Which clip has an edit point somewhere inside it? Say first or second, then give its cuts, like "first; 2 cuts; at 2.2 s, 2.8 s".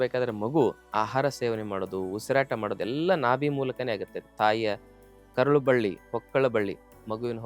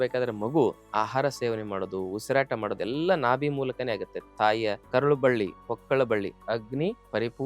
second; 2 cuts; at 4.8 s, 6.5 s